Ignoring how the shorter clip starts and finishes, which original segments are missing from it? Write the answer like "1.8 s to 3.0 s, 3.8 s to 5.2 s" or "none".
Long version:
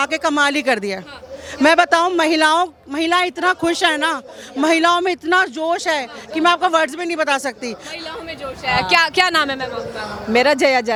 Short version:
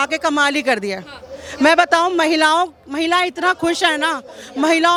none